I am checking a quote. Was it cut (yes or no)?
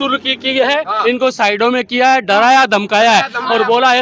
no